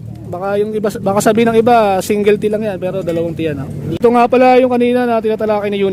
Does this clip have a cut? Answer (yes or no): yes